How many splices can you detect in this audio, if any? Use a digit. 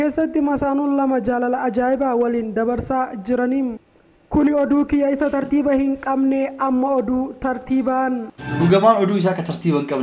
1